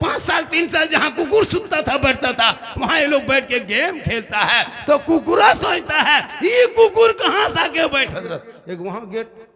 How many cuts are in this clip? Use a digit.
1